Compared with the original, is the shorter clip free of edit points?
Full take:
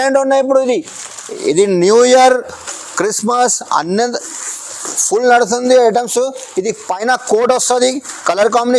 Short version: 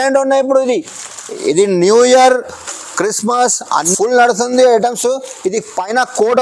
no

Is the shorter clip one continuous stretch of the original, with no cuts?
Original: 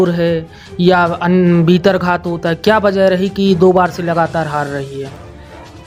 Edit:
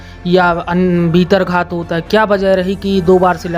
yes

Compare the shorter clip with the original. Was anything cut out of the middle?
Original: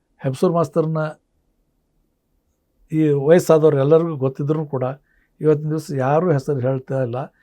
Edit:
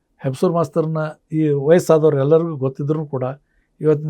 yes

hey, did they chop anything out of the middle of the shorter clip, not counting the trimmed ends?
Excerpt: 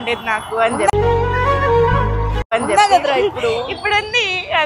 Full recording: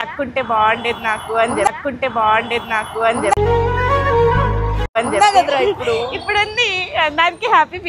yes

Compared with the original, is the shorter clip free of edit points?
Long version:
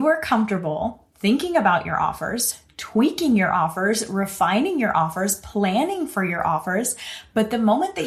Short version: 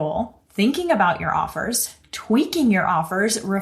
yes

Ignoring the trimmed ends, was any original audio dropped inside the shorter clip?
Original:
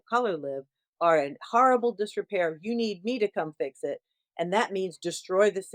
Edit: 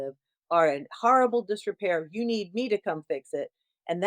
no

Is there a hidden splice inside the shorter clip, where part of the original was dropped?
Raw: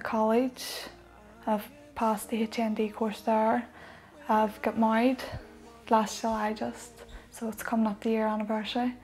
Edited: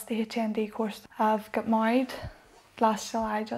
yes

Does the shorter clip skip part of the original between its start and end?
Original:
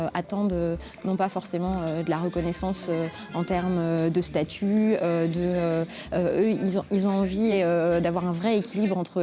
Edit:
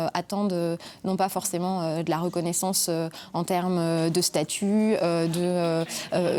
no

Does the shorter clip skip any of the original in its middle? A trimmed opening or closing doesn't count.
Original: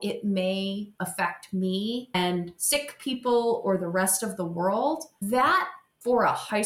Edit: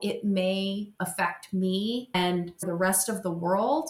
yes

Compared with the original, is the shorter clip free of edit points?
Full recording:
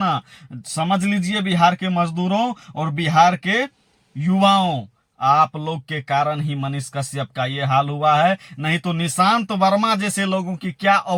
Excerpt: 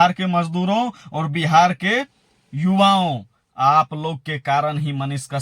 yes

